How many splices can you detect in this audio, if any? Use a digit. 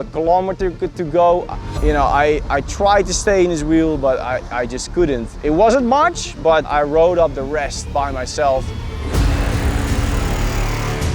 1